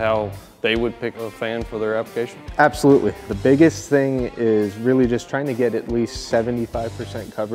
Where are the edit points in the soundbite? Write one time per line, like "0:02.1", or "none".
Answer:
0:01.2
0:03.3